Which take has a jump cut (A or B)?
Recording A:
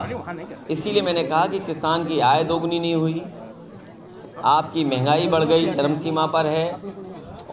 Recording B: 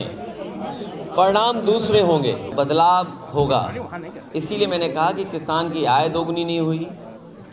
B